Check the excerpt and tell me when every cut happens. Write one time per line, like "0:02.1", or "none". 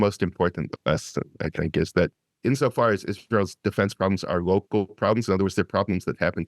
0:02.3